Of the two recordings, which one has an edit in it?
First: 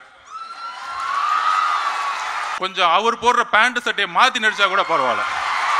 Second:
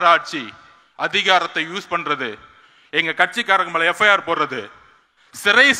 first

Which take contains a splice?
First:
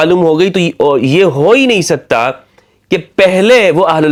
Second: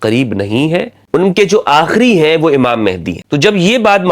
second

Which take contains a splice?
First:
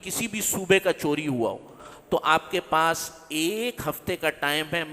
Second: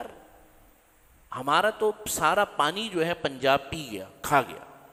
first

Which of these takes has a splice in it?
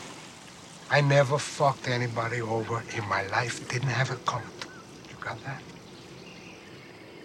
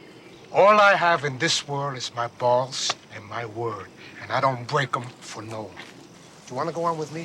second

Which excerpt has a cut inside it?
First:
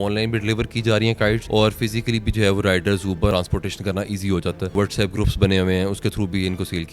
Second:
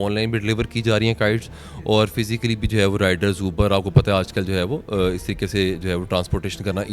first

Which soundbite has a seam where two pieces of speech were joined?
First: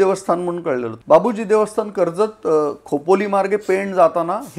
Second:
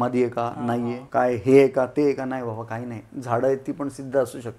second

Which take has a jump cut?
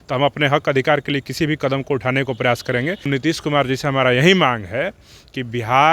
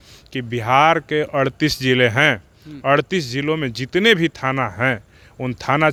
first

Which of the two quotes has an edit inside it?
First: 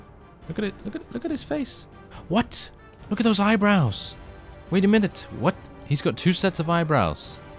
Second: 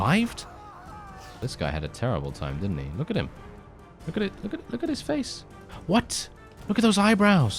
second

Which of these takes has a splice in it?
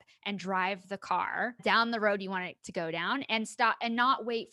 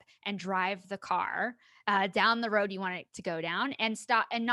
first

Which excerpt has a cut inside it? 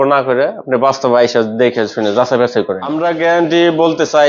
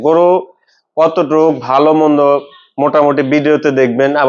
first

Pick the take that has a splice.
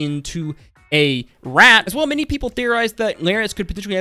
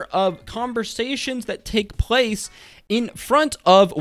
first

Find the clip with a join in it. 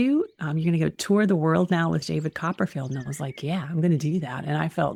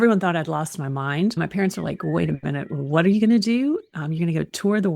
second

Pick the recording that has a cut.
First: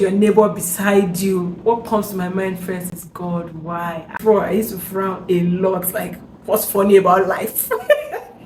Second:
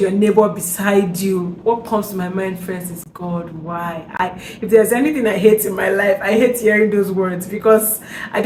first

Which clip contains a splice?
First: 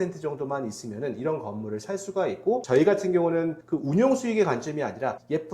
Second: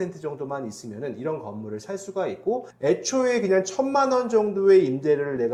first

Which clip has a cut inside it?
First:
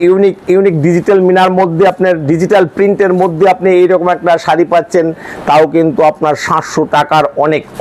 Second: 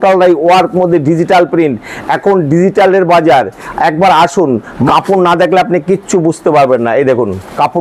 second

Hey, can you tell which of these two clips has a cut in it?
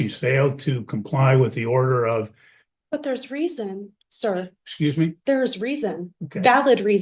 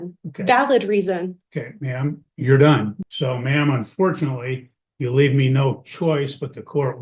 second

